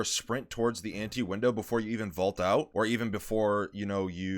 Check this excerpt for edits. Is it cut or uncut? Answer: cut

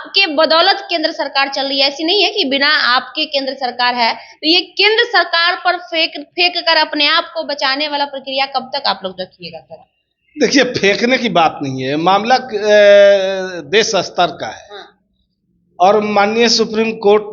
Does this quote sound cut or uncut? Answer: uncut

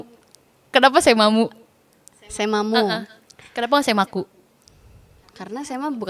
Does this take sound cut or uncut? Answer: uncut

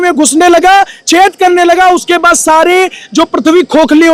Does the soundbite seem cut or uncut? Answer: uncut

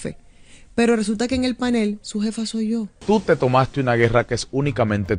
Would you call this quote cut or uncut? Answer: cut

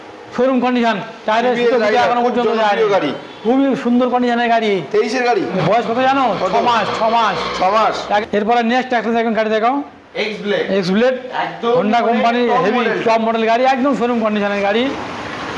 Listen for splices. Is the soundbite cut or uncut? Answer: cut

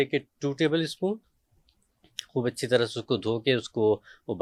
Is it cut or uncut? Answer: uncut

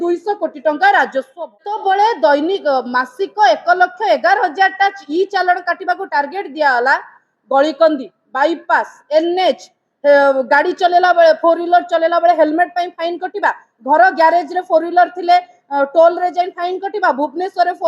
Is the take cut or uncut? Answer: cut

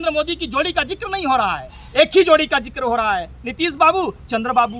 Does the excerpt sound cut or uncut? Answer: uncut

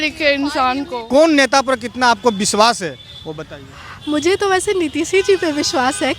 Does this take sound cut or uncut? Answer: cut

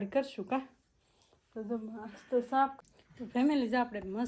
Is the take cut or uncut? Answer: cut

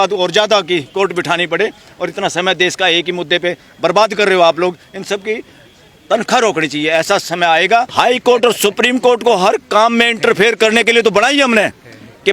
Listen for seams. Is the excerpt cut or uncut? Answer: cut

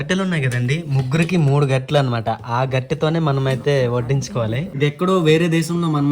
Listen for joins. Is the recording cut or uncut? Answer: cut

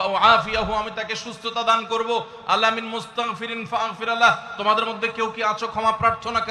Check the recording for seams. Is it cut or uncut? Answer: uncut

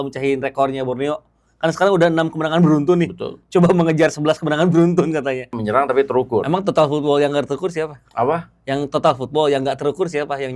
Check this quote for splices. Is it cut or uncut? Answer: cut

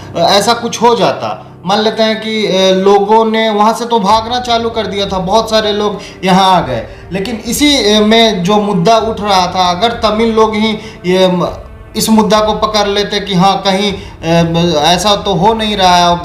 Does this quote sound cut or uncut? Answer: uncut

